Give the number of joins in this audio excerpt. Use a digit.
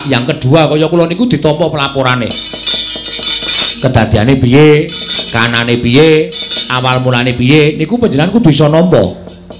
0